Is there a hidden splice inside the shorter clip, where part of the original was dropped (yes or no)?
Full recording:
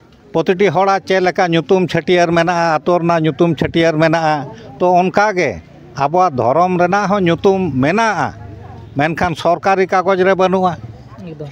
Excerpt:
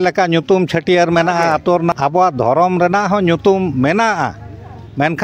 yes